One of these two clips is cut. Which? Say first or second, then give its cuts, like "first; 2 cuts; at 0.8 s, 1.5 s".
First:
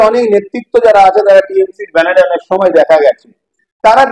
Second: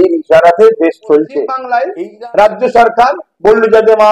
second; 1 cut; at 1.6 s